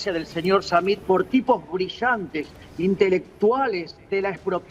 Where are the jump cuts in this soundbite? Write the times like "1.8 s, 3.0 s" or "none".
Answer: 1.0 s